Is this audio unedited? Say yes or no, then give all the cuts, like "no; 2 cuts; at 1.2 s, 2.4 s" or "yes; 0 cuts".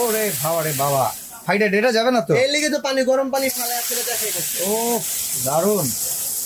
yes; 0 cuts